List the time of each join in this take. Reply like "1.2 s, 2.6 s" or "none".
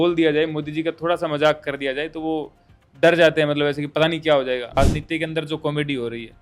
4.8 s